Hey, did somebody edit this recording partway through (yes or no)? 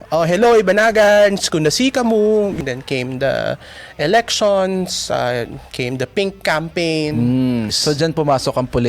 yes